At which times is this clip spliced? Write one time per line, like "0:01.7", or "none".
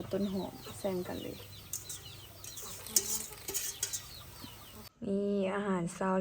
0:04.9